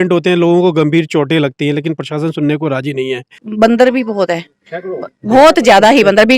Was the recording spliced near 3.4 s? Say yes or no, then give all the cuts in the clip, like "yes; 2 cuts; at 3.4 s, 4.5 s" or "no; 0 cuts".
yes; 1 cut; at 3.4 s